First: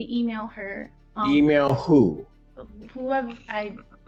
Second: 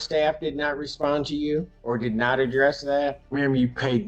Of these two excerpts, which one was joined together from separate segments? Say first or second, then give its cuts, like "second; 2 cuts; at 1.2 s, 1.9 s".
second; 2 cuts; at 1.7 s, 3.2 s